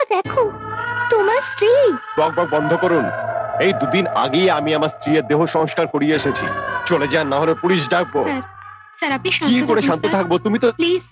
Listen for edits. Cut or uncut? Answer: uncut